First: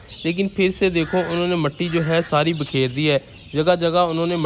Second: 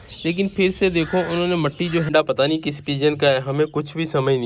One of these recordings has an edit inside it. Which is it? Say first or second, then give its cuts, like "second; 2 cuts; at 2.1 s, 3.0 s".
second; 1 cut; at 2.1 s